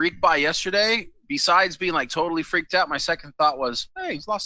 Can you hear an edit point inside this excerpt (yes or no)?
no